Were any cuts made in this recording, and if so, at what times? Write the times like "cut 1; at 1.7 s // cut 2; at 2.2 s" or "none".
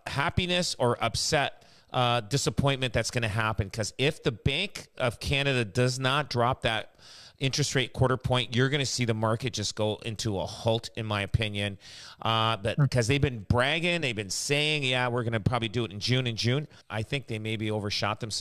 cut 1; at 16.8 s